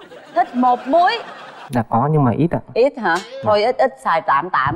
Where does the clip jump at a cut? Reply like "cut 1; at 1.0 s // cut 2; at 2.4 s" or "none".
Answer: cut 1; at 1.6 s